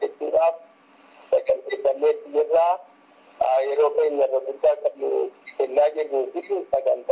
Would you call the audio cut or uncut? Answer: uncut